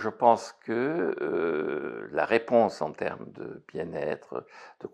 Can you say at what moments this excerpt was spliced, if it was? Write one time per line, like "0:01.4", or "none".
none